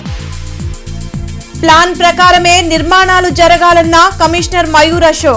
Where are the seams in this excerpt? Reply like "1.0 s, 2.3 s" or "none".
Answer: 1.5 s